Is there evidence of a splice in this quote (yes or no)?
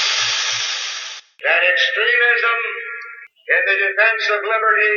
no